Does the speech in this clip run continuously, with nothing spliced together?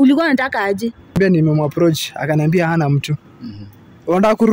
no; 1 cut; at 1.2 s

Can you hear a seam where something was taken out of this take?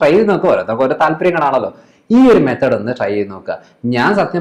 no; 0 cuts

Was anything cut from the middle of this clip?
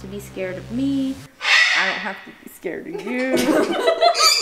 no; 0 cuts

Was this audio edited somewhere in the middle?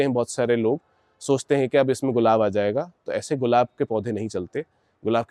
no; 0 cuts

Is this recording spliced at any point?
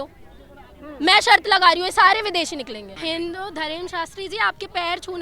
yes; 1 cut; at 2.9 s

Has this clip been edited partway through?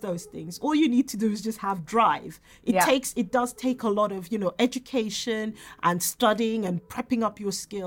no; 0 cuts

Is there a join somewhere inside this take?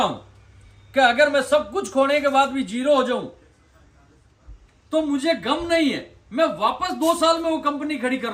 no; 0 cuts

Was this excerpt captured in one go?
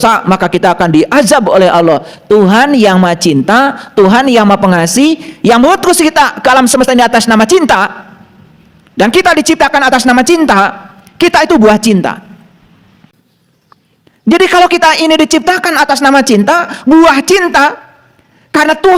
no; 1 cut; at 13.1 s

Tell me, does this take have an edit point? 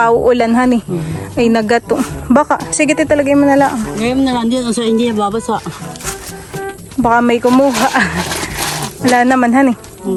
no; 0 cuts

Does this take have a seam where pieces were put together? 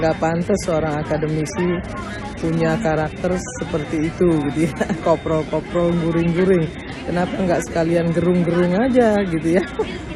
no; 0 cuts

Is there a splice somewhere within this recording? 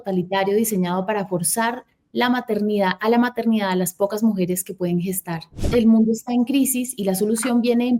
yes; 1 cut; at 5.6 s

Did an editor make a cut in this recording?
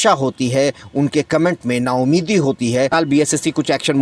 yes; 1 cut; at 2.9 s

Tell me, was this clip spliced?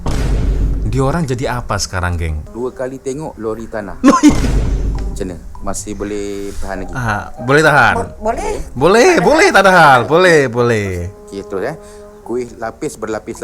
yes; 1 cut; at 2.4 s

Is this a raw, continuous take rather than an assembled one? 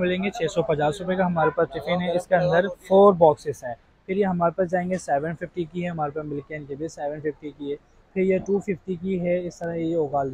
yes; 0 cuts

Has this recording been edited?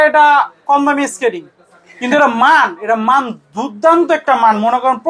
no; 0 cuts

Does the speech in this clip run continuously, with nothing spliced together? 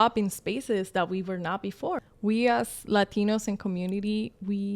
no; 1 cut; at 2.0 s

